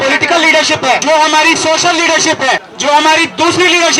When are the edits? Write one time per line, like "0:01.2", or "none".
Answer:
0:01.0
0:02.7